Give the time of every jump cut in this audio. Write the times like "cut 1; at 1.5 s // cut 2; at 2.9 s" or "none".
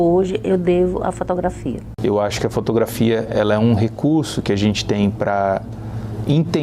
cut 1; at 1.9 s